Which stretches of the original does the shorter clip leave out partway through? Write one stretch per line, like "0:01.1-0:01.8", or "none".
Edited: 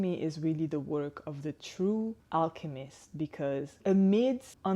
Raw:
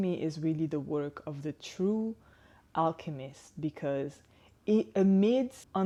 0:02.2-0:02.6
0:04.2-0:04.9